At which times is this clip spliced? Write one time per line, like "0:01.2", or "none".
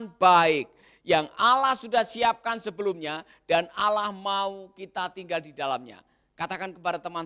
none